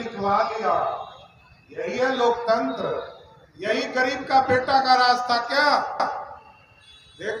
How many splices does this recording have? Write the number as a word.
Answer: zero